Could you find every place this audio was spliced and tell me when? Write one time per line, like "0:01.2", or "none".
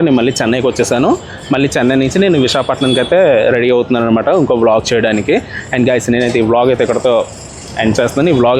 none